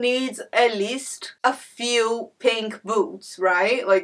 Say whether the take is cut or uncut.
uncut